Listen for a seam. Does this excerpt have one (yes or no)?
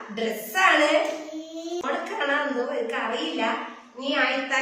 yes